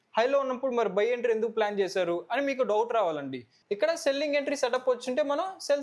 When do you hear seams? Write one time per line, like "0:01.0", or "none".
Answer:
0:03.5